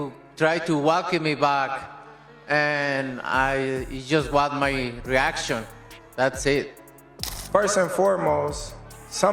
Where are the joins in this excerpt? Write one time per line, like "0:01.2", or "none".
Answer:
0:07.2